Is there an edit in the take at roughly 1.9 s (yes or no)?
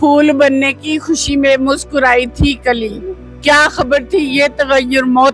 no